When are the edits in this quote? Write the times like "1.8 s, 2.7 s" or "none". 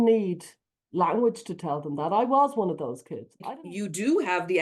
3.4 s